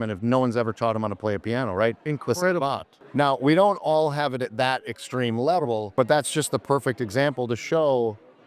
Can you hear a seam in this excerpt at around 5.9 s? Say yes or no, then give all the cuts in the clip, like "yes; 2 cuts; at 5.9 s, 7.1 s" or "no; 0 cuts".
yes; 2 cuts; at 2.9 s, 5.9 s